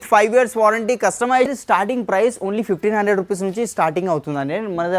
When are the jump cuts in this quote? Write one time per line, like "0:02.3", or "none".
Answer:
0:01.5